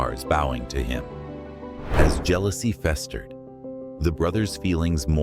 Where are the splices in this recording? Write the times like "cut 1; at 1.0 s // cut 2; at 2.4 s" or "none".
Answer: cut 1; at 1.8 s